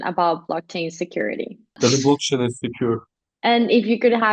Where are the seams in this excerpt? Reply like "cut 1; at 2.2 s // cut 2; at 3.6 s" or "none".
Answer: cut 1; at 1.8 s // cut 2; at 3.1 s